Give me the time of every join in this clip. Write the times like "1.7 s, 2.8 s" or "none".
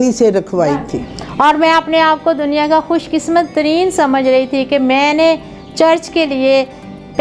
1.0 s